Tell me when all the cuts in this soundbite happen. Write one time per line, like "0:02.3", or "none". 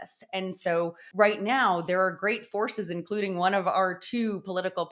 0:01.0